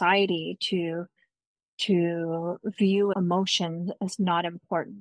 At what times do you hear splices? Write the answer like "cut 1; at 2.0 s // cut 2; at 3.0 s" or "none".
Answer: cut 1; at 3.1 s